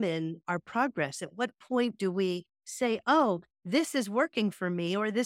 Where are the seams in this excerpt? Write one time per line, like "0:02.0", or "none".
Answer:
none